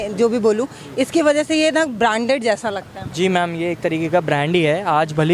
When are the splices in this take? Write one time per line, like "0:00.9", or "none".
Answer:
none